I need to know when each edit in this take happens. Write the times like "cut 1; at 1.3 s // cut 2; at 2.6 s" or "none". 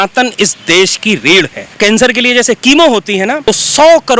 cut 1; at 1.7 s // cut 2; at 3.5 s